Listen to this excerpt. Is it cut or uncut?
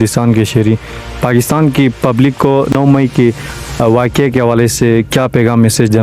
cut